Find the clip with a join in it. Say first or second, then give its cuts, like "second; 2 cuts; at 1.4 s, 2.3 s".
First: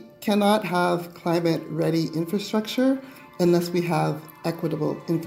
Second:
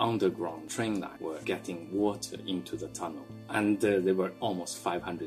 second; 3 cuts; at 1.0 s, 3.4 s, 4.3 s